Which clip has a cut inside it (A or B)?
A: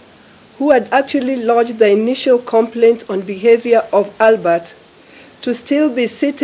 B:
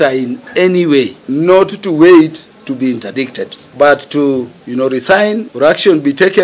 B